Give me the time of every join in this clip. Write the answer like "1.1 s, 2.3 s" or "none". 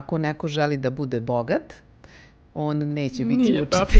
none